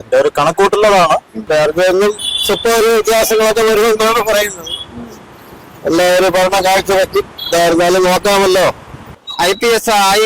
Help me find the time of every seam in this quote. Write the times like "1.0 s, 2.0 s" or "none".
1.4 s, 9.2 s

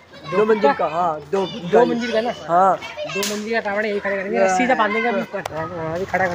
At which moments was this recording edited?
5.4 s

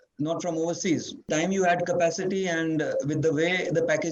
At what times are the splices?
1.3 s

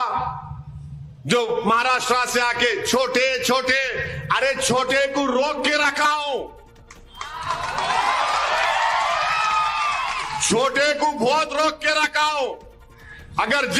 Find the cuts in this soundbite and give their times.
none

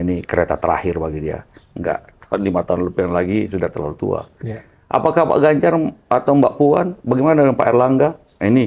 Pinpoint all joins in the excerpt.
none

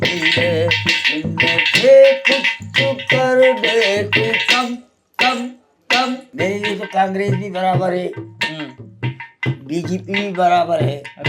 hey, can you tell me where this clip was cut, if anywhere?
6.3 s

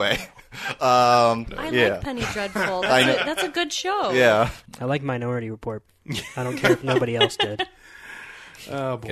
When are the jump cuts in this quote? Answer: 1.5 s, 4.6 s, 5.9 s

